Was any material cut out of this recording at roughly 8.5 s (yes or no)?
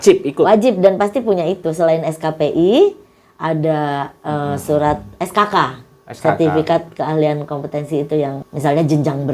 yes